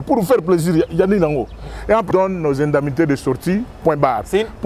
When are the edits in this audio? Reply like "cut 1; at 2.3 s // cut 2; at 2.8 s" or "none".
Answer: cut 1; at 2.1 s